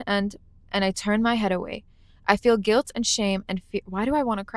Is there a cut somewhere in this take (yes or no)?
no